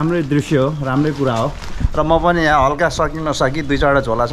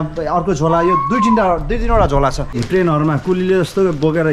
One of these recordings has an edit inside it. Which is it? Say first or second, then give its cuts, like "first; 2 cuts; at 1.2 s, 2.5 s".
second; 1 cut; at 2.5 s